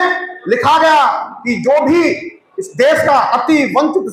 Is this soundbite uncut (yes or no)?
yes